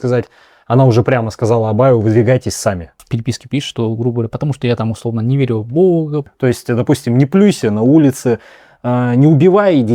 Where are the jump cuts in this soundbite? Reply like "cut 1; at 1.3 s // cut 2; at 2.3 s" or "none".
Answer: cut 1; at 3.1 s // cut 2; at 6.3 s

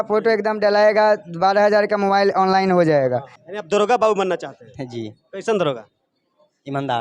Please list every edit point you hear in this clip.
cut 1; at 3.4 s

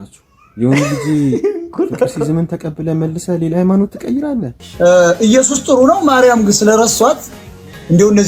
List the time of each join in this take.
cut 1; at 4.6 s

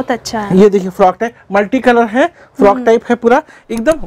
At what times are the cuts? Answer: none

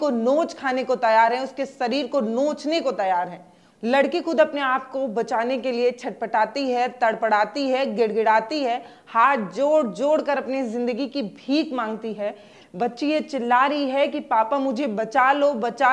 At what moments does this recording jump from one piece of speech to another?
none

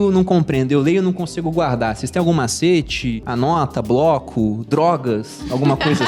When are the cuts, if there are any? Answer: cut 1; at 3.2 s

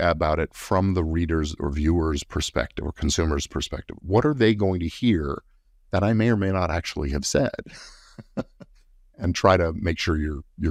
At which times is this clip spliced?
none

